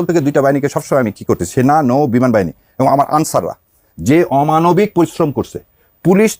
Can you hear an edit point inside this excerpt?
no; 0 cuts

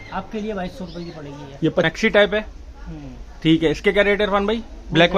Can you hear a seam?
yes; 1 cut; at 1.9 s

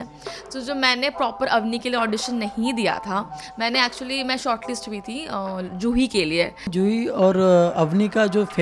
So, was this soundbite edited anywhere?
yes; 1 cut; at 6.7 s

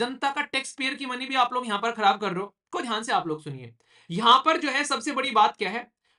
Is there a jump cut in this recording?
yes; 1 cut; at 2.6 s

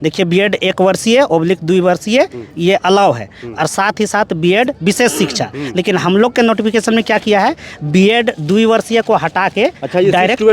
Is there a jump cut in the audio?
no; 0 cuts

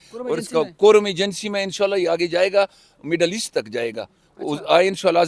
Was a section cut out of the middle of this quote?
no; 0 cuts

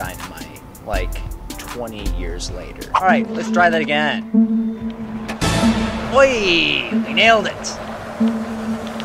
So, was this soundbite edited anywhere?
yes; 1 cut; at 3.0 s

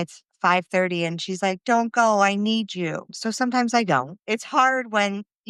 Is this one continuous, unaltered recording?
no; 2 cuts; at 3.1 s, 4.1 s

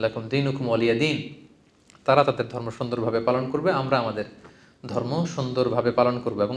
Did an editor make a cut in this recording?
no; 0 cuts

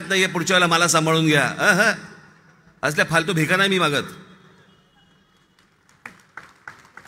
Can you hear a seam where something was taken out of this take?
no; 0 cuts

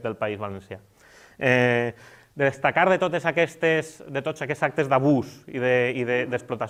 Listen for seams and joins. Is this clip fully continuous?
yes; 0 cuts

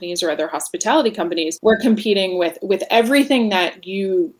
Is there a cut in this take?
yes; 1 cut; at 1.5 s

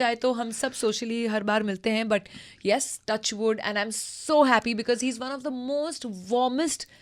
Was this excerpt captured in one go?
yes; 0 cuts

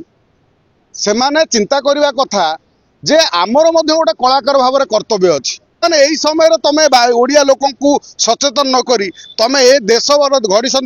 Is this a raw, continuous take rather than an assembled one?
no; 1 cut; at 5.8 s

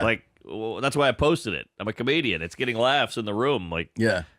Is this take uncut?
no; 1 cut; at 2.4 s

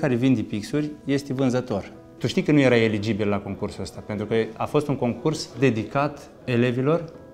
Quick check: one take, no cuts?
no; 3 cuts; at 2.0 s, 5.5 s, 6.3 s

